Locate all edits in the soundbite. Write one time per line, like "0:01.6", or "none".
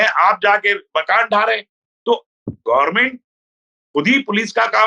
none